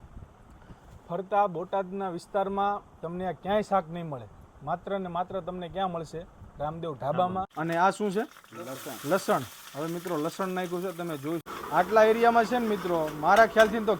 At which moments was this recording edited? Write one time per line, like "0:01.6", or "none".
0:07.5
0:11.4